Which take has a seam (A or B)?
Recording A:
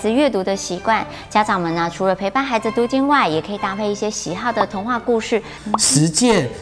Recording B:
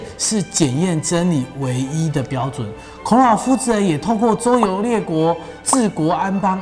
A